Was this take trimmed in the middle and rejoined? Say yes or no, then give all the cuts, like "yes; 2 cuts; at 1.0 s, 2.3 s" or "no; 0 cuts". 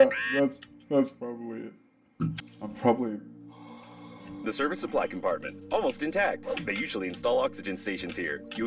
yes; 1 cut; at 2.5 s